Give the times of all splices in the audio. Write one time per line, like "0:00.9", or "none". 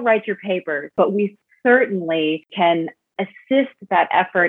0:00.9
0:02.5